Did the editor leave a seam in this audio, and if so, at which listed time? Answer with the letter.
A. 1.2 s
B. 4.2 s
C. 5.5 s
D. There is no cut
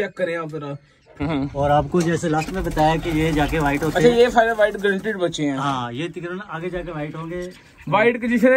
A